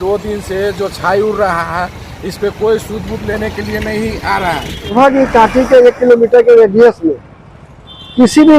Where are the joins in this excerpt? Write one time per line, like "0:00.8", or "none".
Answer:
0:04.9